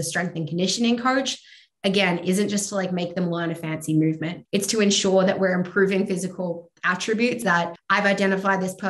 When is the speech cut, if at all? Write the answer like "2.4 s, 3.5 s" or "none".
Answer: 4.3 s, 7.4 s